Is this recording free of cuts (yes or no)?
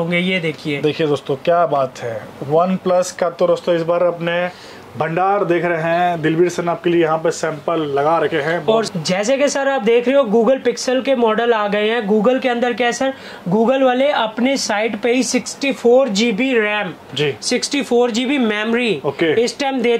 yes